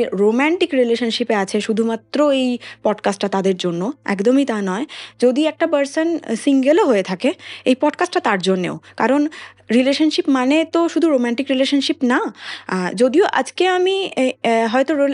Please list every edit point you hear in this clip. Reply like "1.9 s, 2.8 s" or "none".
none